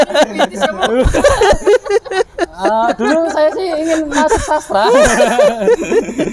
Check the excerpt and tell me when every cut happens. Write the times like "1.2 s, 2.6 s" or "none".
none